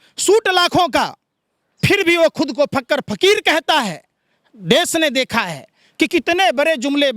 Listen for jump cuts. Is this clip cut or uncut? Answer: uncut